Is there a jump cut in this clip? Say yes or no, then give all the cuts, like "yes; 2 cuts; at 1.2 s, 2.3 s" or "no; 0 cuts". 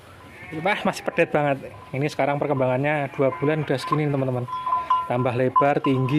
no; 0 cuts